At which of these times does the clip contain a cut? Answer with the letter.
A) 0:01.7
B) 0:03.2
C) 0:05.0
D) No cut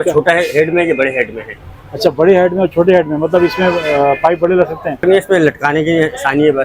C